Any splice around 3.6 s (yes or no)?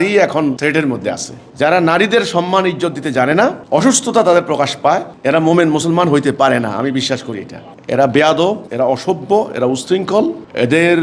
no